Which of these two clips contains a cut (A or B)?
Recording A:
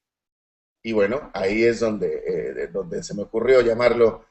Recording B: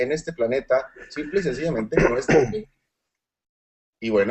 B